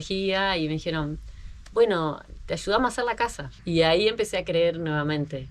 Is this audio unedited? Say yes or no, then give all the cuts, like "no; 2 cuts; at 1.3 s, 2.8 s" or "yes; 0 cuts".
no; 1 cut; at 3.5 s